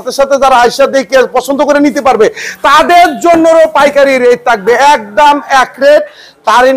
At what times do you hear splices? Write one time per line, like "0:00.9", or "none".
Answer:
none